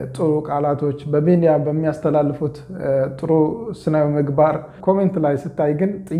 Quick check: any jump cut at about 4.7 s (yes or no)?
yes